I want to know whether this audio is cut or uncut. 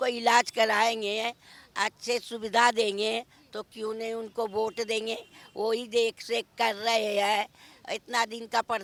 uncut